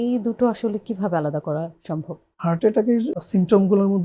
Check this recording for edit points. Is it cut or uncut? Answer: cut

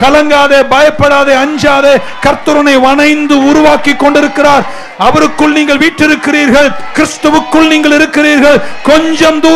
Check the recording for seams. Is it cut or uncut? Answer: uncut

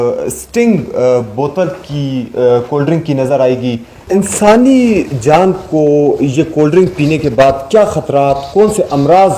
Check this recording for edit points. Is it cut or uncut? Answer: cut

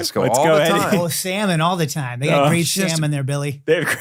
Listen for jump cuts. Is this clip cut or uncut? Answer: uncut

